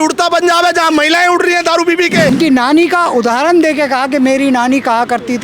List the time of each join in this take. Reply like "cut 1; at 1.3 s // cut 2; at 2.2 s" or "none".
cut 1; at 2.3 s